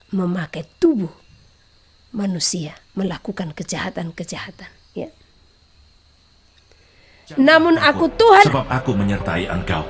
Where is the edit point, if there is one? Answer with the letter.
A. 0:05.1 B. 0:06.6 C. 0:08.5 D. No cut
C